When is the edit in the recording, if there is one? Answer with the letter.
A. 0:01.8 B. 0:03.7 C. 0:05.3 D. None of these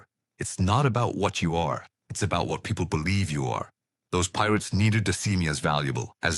D